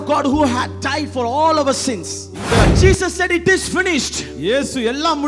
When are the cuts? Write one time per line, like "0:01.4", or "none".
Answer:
0:02.7